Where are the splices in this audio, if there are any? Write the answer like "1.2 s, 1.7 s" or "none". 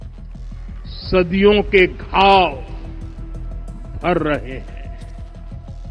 none